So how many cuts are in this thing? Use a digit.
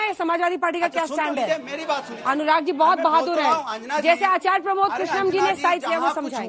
0